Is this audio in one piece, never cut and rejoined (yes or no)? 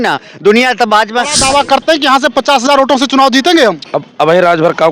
no